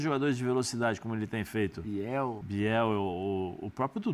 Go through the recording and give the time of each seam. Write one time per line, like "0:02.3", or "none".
0:02.4